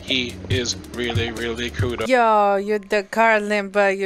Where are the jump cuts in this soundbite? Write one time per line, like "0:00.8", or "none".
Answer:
0:02.1

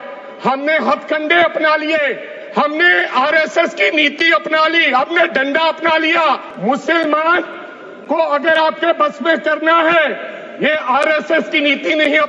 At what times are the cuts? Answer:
0:06.5

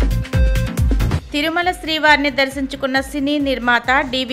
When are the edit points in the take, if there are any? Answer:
0:01.2

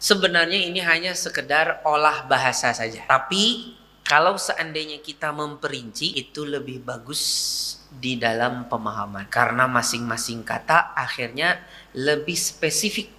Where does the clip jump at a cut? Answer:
0:03.0
0:06.1
0:09.2

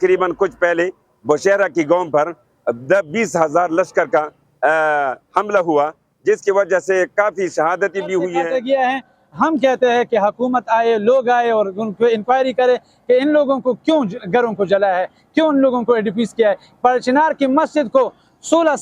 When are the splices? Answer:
0:08.4

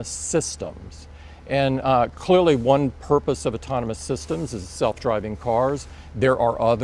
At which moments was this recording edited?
0:01.0

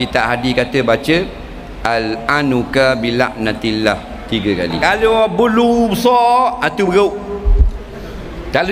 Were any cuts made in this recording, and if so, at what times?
0:04.8

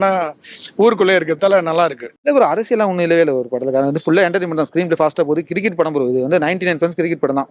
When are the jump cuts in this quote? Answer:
0:02.1

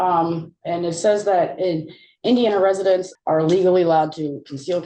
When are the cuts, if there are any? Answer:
0:03.1

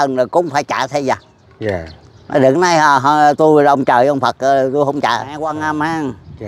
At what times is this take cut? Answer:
0:05.6

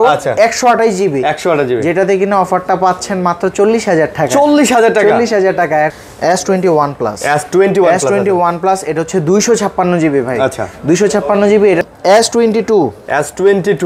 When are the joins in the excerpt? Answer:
0:06.0
0:11.9

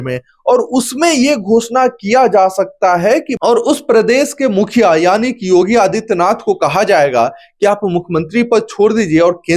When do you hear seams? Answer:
0:03.4

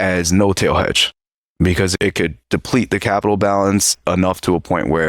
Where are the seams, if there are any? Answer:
0:01.9

